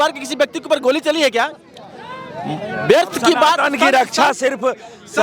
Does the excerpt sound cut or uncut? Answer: uncut